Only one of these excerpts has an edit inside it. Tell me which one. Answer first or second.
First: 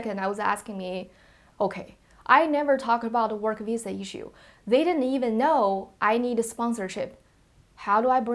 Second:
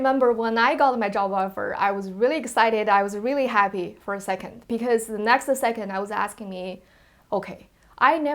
second